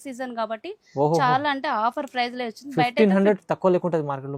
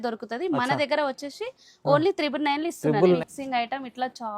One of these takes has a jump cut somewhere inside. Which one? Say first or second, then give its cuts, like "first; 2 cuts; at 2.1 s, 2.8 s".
second; 1 cut; at 3.2 s